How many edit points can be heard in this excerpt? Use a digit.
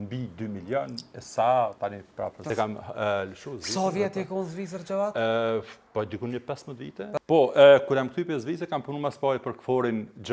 2